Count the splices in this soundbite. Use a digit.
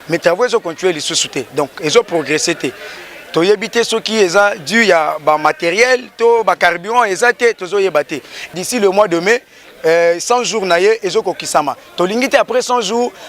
1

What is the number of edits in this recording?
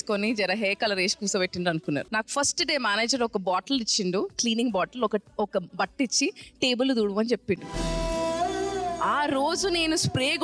1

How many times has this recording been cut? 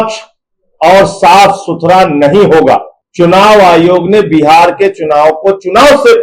1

